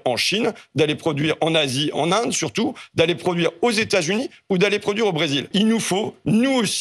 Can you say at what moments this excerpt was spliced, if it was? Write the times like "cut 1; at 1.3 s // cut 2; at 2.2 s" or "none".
cut 1; at 5.5 s